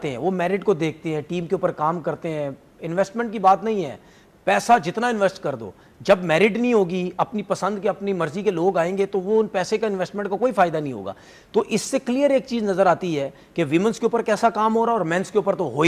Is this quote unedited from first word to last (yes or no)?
yes